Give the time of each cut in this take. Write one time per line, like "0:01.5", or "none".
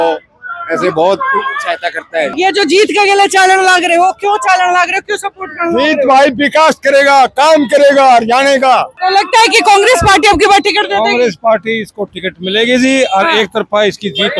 0:02.3
0:08.9